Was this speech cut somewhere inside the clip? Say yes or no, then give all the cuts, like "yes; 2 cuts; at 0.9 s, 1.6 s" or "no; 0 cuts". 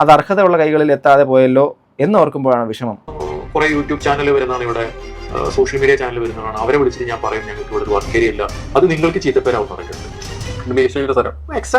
yes; 1 cut; at 3.0 s